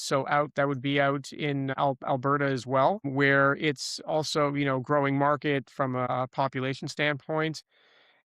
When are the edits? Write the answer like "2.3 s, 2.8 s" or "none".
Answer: 1.7 s, 3.1 s, 6.1 s